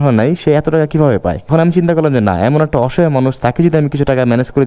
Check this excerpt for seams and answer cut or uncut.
cut